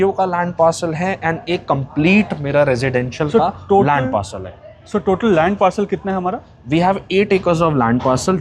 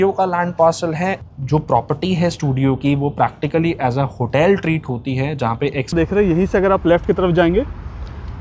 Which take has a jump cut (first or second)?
second